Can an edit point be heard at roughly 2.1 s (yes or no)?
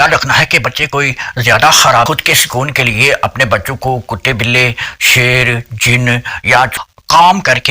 yes